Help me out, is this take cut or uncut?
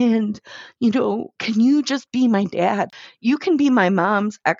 cut